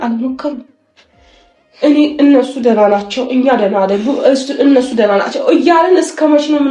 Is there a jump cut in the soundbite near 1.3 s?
no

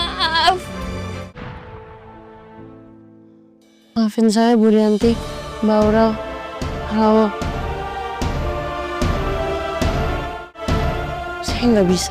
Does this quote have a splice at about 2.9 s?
no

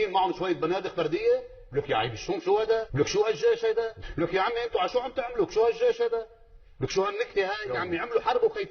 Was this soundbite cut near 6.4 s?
no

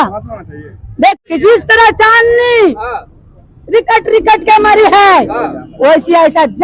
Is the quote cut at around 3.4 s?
no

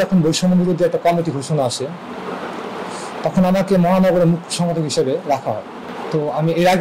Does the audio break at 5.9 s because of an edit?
yes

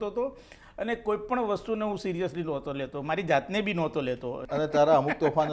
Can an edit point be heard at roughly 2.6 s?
no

